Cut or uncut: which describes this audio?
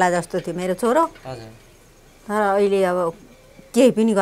uncut